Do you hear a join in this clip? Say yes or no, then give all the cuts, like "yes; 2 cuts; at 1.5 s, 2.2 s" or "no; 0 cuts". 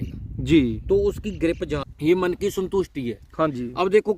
yes; 1 cut; at 1.8 s